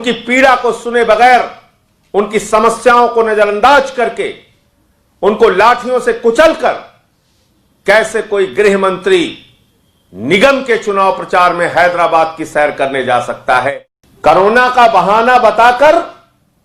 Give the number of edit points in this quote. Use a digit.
1